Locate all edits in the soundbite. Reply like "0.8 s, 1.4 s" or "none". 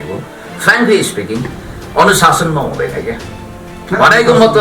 none